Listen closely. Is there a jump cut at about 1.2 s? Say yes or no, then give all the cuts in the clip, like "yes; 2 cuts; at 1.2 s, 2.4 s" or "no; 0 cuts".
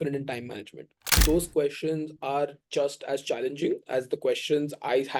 yes; 1 cut; at 1.2 s